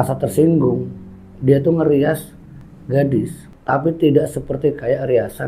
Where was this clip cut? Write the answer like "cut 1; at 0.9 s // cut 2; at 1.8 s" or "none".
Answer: none